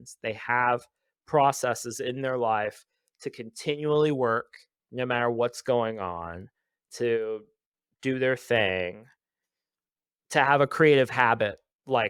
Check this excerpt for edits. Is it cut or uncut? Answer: uncut